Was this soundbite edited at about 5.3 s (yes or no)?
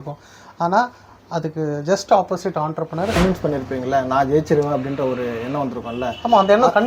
no